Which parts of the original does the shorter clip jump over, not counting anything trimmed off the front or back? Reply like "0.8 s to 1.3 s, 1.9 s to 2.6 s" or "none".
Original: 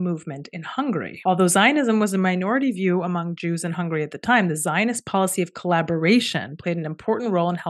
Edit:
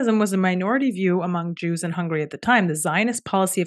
none